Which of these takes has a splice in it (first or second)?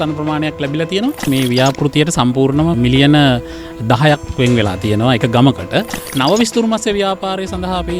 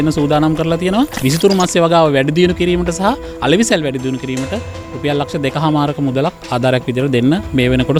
first